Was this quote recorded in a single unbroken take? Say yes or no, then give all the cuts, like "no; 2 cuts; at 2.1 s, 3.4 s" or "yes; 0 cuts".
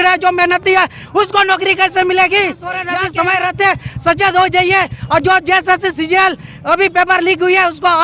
no; 1 cut; at 2.9 s